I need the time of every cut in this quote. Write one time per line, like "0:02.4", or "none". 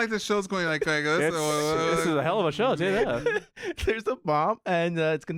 none